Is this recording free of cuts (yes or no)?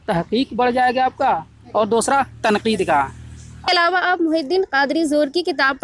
no